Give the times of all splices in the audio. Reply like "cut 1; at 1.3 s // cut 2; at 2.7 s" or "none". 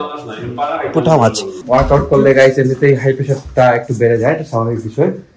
cut 1; at 1.6 s